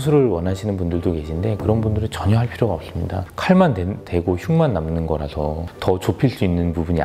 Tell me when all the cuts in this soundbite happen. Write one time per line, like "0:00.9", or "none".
none